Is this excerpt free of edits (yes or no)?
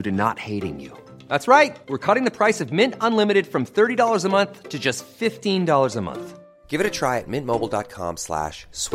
yes